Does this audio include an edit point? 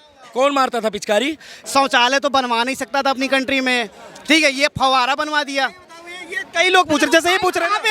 yes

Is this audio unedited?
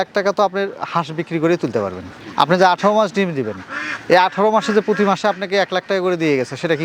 no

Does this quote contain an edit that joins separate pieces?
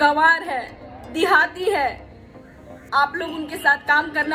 no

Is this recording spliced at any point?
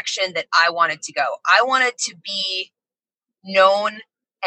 no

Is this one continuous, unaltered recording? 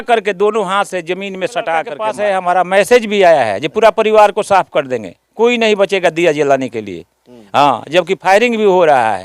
no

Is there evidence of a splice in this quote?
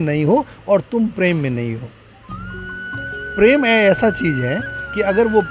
no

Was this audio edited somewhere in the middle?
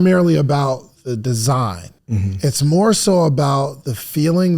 yes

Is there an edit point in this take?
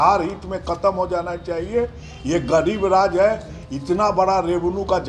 no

